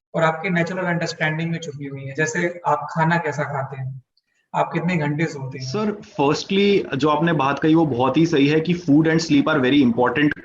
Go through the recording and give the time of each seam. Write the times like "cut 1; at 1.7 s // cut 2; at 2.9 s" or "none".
cut 1; at 5.6 s